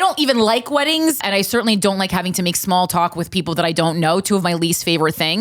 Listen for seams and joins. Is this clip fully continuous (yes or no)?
no